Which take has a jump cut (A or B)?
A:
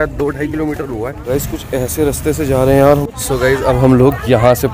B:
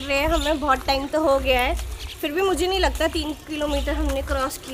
A